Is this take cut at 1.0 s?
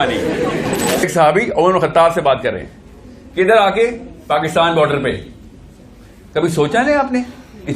yes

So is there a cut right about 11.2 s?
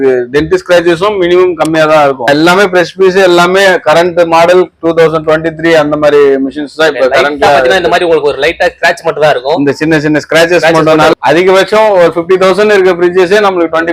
yes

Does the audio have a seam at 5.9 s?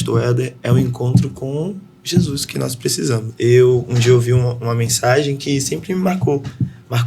no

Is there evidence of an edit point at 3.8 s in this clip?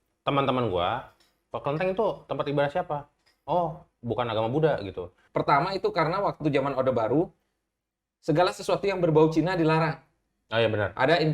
no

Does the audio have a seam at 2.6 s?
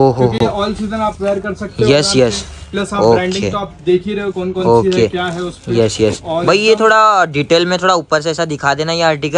no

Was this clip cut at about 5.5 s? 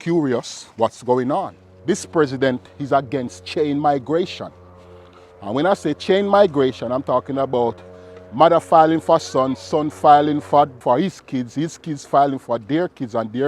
no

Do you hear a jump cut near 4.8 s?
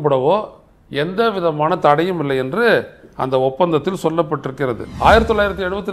yes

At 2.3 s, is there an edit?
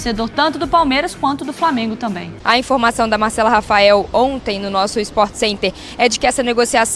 yes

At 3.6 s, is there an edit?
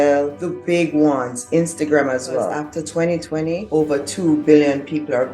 yes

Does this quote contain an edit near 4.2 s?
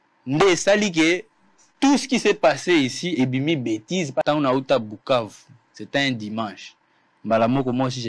yes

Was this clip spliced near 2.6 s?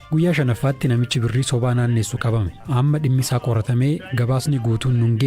yes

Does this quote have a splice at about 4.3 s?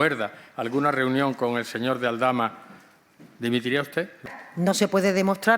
yes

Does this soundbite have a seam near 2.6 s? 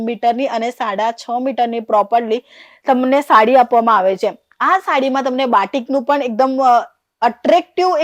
no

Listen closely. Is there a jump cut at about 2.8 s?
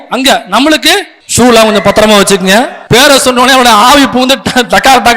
yes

